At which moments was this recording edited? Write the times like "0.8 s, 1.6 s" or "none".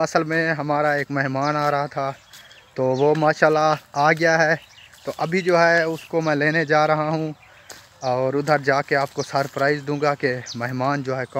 none